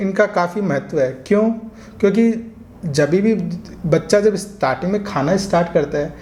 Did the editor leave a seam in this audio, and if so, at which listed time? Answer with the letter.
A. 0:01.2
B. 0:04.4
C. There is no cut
C